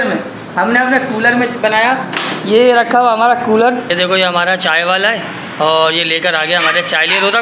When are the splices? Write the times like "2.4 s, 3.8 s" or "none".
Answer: 3.9 s